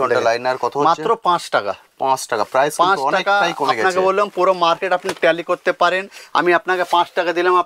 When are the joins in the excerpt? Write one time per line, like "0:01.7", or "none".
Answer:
none